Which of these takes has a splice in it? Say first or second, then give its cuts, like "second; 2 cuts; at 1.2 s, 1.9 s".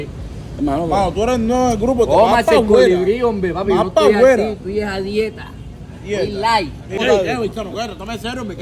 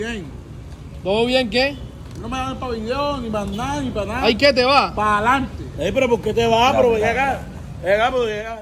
first; 1 cut; at 7.0 s